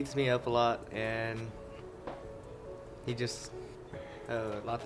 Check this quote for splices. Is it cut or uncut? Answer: cut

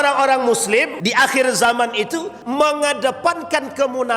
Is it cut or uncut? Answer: cut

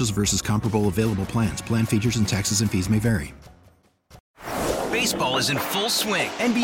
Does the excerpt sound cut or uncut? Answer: cut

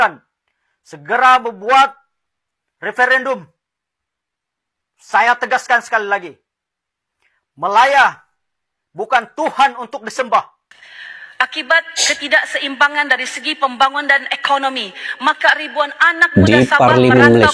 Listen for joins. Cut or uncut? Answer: cut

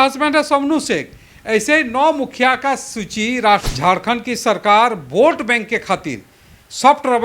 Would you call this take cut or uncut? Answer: cut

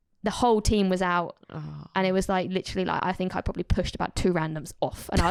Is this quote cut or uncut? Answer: uncut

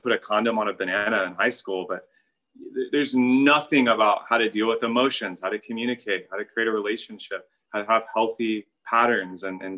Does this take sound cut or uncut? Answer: cut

